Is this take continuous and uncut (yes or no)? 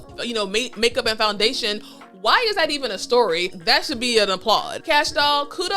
no